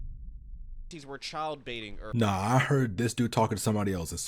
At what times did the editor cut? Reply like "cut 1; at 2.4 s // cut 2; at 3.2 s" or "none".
cut 1; at 0.9 s